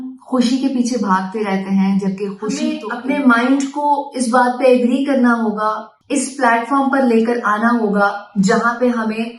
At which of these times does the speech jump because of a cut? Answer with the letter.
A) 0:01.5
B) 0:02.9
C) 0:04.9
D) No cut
B